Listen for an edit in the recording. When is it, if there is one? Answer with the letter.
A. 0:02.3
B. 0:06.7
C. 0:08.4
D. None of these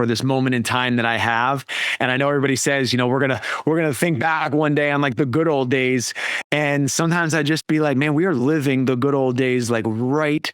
C